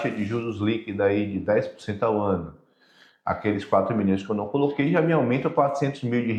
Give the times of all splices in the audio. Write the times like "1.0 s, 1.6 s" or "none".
none